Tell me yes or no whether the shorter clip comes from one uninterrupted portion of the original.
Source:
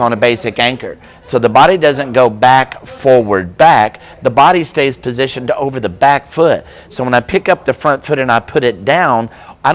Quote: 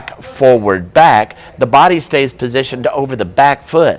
yes